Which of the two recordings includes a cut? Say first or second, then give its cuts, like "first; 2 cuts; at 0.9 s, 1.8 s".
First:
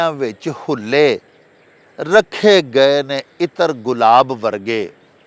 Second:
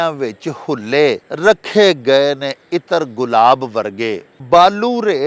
second; 2 cuts; at 1.3 s, 4.3 s